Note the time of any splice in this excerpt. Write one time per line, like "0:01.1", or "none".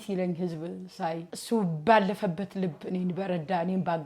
0:01.3